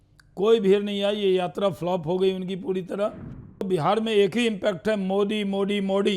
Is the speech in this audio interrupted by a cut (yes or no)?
yes